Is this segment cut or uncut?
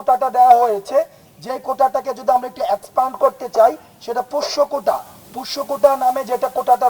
uncut